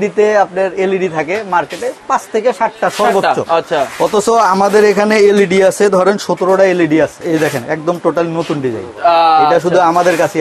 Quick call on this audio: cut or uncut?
cut